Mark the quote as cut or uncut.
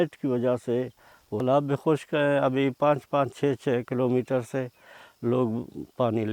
cut